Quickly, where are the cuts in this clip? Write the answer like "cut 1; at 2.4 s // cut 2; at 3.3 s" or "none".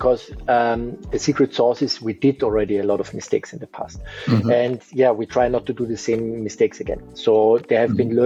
none